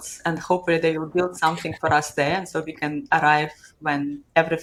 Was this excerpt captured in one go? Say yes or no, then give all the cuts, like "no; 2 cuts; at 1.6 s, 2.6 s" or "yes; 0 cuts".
yes; 0 cuts